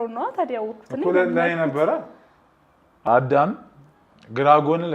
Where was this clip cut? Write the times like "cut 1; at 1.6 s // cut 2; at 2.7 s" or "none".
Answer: cut 1; at 3.1 s